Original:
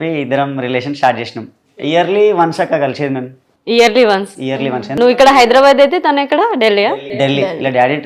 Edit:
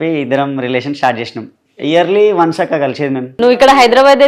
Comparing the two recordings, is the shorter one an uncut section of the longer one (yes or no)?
no